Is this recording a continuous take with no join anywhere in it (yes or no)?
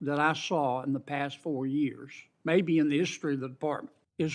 yes